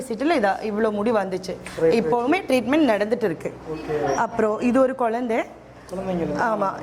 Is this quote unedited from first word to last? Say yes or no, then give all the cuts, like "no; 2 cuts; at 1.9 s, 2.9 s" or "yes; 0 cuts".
yes; 0 cuts